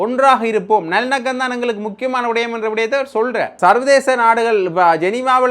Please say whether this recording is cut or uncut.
cut